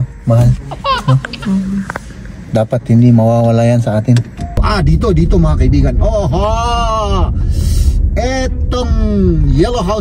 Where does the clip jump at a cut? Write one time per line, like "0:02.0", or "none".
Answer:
0:04.6